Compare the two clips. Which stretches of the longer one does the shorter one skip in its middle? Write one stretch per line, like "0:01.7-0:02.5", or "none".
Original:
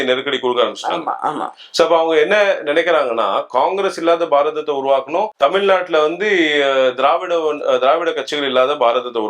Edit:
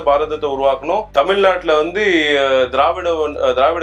none